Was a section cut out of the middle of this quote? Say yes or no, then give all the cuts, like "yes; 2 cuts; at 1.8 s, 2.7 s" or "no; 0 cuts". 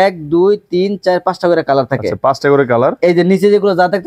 no; 0 cuts